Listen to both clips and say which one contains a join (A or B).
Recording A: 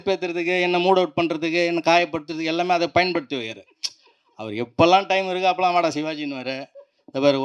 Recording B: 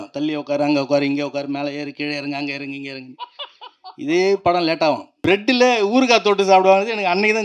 B